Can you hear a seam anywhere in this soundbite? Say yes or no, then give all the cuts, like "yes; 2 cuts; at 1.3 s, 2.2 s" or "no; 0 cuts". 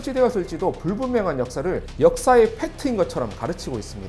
yes; 1 cut; at 1.9 s